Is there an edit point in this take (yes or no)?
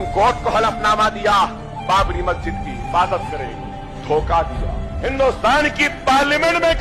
no